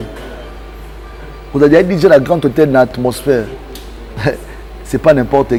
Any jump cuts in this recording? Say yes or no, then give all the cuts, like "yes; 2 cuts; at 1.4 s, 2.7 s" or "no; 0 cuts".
no; 0 cuts